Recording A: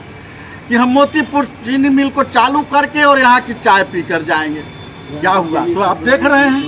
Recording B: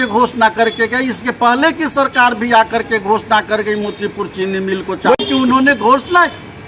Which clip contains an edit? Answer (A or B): B